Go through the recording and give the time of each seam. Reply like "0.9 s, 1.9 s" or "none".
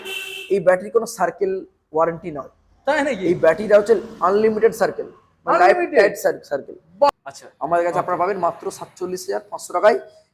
7.1 s